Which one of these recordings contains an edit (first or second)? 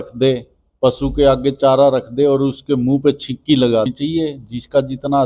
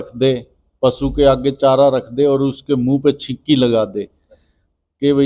first